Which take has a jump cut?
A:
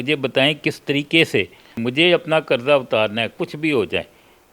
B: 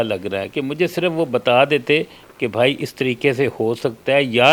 A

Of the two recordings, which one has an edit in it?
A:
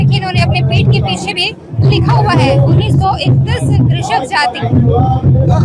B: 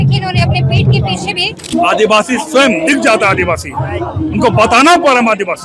B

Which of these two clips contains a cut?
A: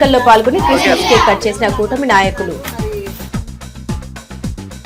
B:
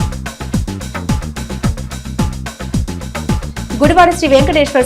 B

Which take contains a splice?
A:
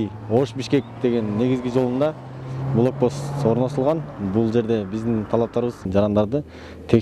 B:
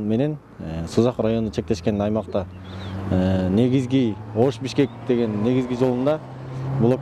A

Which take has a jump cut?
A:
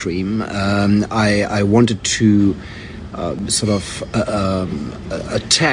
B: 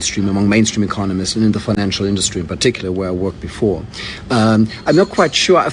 A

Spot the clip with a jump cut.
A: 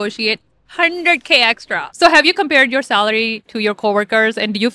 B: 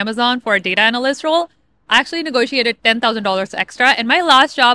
A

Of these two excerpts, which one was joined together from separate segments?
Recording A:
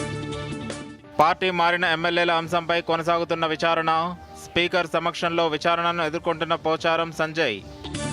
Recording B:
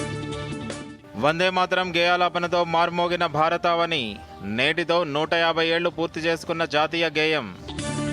A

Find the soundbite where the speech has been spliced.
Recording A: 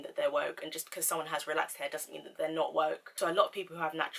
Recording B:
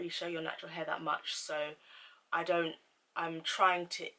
A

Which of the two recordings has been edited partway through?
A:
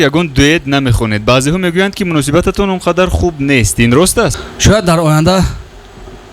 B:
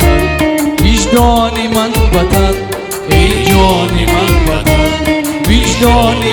A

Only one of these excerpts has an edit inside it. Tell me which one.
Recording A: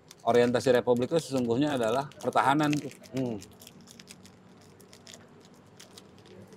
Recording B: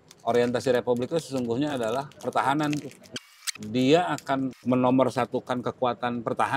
B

